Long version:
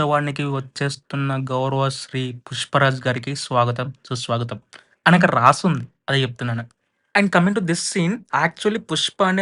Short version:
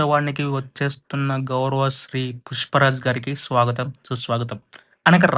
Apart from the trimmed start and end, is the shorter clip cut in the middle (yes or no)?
no